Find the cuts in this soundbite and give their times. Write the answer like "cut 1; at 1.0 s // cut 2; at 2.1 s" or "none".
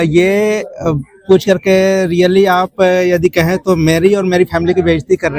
none